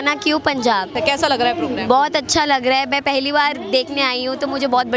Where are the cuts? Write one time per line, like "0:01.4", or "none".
0:00.9